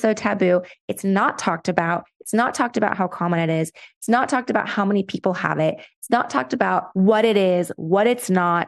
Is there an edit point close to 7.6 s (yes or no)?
no